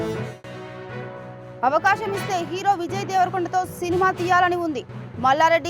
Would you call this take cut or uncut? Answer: cut